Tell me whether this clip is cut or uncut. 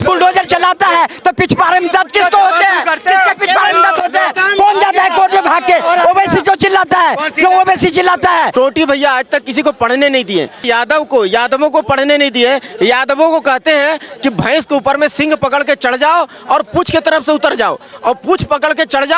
cut